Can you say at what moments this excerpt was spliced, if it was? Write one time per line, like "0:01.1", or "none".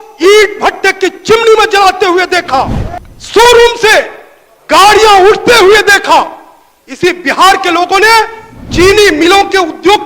0:02.8